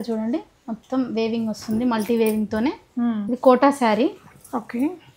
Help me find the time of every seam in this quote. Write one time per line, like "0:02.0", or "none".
0:03.2